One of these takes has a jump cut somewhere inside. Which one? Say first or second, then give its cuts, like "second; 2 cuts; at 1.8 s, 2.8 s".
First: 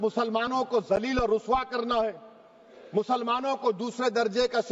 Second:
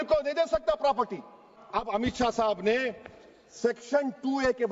second; 1 cut; at 1.6 s